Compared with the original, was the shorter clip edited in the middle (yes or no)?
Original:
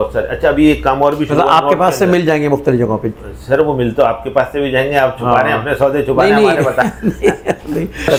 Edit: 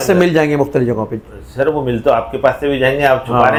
no